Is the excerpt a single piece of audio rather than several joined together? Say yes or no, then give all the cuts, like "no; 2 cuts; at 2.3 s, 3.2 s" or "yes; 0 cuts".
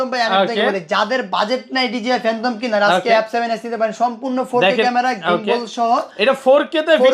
yes; 0 cuts